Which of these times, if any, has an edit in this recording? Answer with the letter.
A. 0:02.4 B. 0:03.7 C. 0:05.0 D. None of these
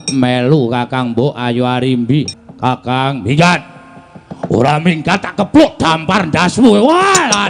A